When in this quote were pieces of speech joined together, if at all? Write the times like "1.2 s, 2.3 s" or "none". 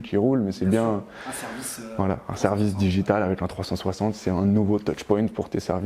none